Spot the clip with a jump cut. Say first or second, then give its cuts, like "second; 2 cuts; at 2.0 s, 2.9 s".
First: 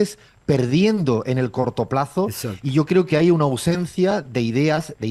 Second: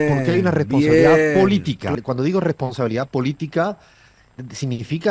second; 1 cut; at 1.9 s